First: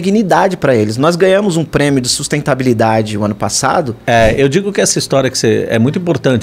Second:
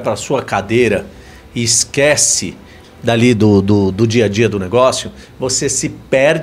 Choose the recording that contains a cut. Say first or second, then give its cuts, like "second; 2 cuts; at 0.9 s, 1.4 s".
first; 1 cut; at 4.0 s